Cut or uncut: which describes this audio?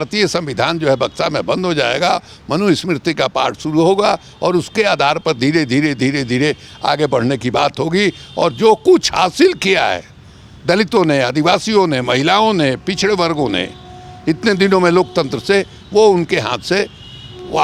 uncut